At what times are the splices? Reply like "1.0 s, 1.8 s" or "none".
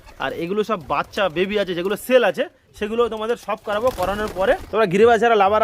4.6 s